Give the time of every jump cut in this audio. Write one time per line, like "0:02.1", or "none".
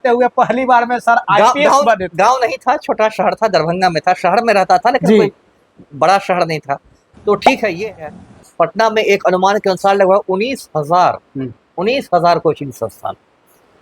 0:08.2

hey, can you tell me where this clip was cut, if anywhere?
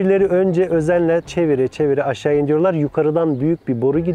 0:01.3

